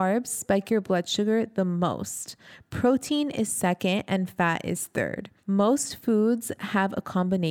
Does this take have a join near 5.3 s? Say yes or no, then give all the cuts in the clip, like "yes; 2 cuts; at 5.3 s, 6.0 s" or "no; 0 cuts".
yes; 1 cut; at 5.3 s